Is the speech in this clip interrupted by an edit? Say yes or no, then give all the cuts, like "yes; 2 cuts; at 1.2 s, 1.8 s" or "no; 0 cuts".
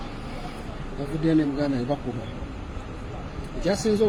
no; 0 cuts